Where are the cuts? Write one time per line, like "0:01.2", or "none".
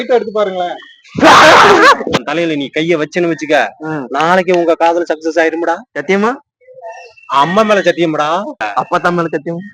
0:02.2
0:08.6